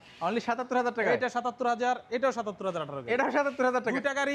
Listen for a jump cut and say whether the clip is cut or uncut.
uncut